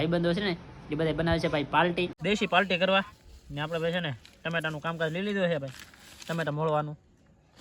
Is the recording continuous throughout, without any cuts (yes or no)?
no